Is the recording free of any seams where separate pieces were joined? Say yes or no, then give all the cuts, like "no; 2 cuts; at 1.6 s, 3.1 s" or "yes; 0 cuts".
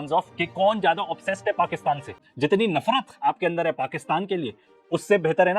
no; 1 cut; at 2.2 s